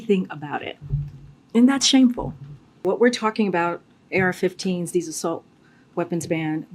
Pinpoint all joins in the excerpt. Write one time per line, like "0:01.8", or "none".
0:02.8